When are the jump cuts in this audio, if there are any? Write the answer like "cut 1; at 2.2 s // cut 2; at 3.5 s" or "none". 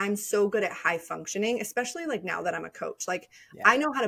none